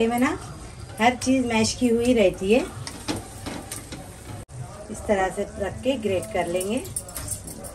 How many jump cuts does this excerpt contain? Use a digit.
1